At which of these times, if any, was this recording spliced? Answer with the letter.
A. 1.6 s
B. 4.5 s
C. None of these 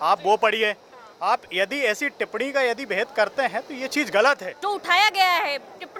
B